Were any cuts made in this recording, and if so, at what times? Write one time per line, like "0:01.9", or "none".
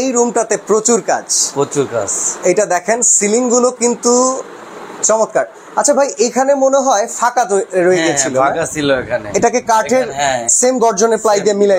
none